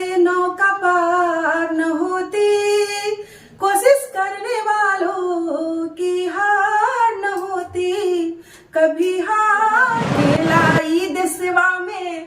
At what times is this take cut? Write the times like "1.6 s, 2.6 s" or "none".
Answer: 10.1 s